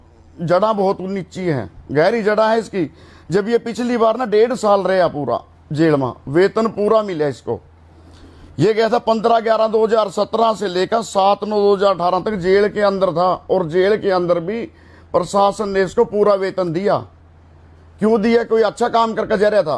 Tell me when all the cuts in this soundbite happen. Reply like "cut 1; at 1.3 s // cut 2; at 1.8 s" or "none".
none